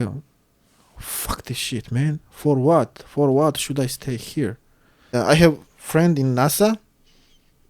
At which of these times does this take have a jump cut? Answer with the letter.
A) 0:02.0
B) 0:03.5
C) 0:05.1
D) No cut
C